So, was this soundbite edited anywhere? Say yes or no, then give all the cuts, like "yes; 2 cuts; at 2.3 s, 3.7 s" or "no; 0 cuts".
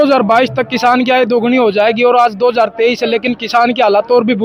no; 0 cuts